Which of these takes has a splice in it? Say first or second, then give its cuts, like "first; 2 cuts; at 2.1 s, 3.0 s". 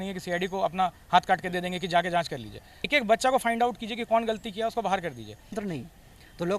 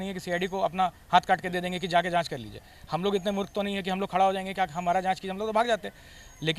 first; 2 cuts; at 2.9 s, 5.6 s